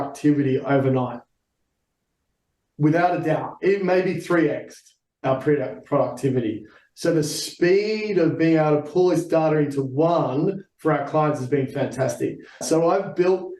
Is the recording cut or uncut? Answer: cut